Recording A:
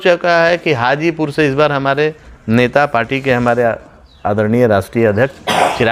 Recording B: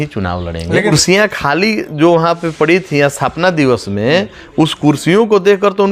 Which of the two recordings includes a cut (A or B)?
B